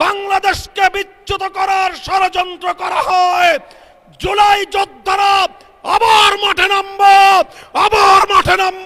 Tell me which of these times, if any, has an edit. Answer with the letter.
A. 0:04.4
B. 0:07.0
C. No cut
C